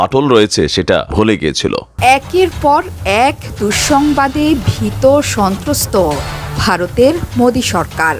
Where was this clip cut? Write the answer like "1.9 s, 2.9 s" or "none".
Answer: 1.1 s, 1.9 s